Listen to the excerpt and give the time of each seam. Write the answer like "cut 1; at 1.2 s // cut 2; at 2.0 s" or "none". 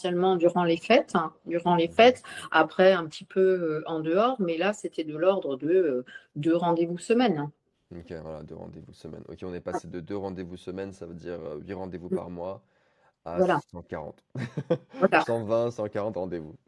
none